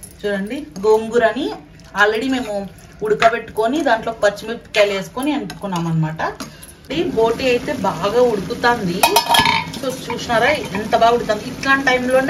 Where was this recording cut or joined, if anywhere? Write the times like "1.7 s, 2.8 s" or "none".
6.9 s